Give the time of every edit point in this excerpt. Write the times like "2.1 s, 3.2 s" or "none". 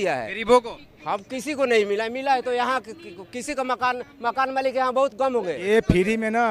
5.6 s